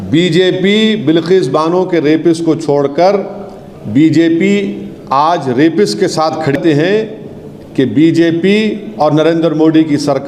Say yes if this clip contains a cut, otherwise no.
yes